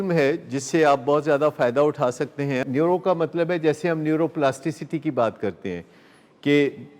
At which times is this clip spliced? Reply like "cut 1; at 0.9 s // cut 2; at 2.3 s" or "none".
cut 1; at 2.7 s